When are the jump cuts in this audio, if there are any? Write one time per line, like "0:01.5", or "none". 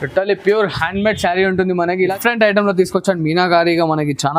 0:02.2